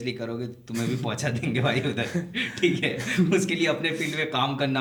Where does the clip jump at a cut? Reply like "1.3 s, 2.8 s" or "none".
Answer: none